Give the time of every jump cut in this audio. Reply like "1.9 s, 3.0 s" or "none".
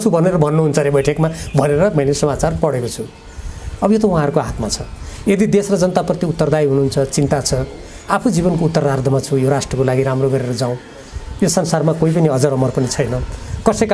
none